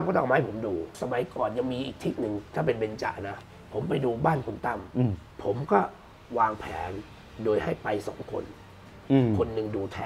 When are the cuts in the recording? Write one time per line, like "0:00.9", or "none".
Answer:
0:00.9
0:03.3
0:05.3